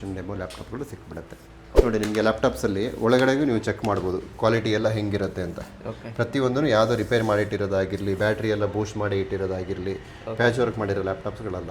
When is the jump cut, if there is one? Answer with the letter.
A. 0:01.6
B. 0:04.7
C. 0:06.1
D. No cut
A